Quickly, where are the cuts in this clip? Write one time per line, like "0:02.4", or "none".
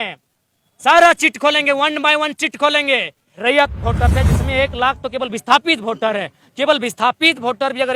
0:03.3